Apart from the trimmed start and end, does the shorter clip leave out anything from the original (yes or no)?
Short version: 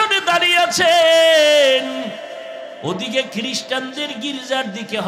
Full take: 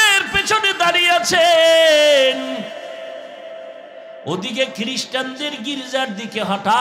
yes